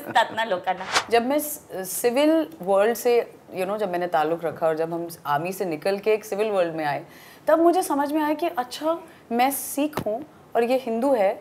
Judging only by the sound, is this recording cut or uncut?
cut